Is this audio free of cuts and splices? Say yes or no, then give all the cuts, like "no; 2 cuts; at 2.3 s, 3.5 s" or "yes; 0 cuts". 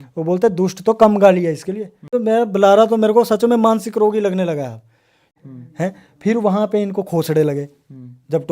no; 2 cuts; at 2.2 s, 5.2 s